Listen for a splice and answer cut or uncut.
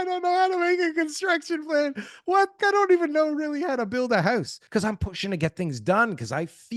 cut